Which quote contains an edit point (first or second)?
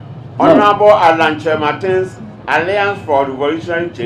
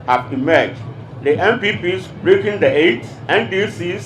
second